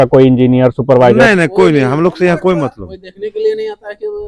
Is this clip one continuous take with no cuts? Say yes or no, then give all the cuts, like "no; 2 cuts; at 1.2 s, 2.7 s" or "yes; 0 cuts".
yes; 0 cuts